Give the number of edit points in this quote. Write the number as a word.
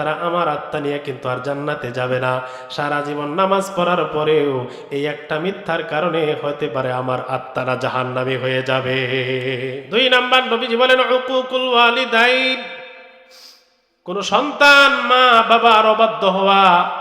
one